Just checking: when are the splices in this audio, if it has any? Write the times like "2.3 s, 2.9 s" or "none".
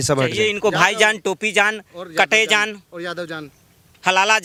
none

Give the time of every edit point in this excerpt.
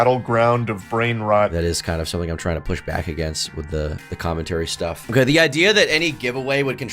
1.5 s, 5.1 s

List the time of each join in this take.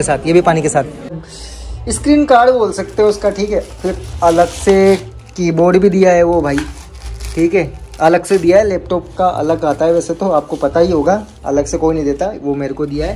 1.2 s

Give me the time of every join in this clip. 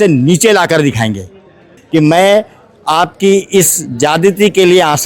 1.7 s

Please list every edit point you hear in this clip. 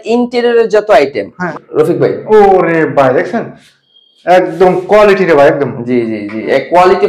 1.4 s

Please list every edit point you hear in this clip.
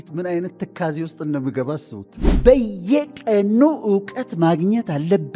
2.3 s

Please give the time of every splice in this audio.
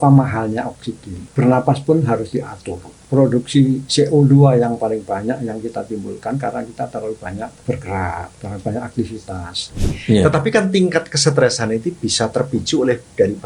1.2 s, 2.9 s, 7.5 s, 8.4 s, 9.9 s

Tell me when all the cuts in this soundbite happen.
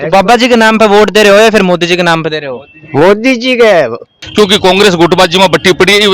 4.1 s

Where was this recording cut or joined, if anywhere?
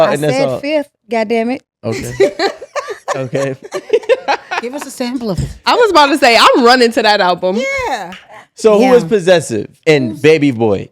none

